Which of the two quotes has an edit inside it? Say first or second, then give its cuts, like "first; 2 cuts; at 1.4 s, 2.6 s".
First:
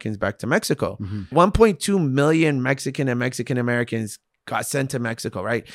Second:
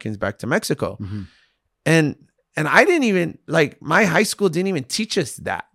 first; 1 cut; at 1.3 s